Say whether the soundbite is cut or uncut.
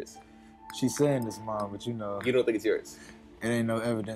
uncut